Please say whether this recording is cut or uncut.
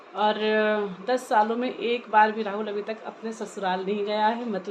uncut